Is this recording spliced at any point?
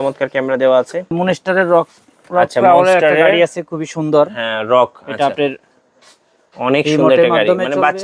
yes; 1 cut; at 1.1 s

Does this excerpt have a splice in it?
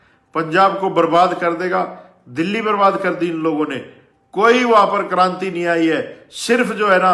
no; 0 cuts

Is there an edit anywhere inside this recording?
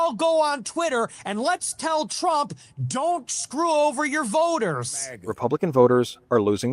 yes; 1 cut; at 5.2 s

